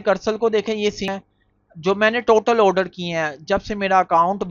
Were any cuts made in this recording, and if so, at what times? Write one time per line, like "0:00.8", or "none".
0:01.1